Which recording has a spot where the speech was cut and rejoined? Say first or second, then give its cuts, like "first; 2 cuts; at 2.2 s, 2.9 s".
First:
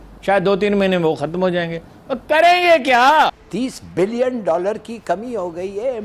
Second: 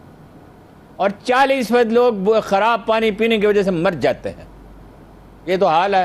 first; 1 cut; at 3.4 s